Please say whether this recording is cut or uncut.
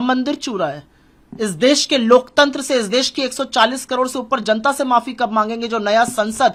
uncut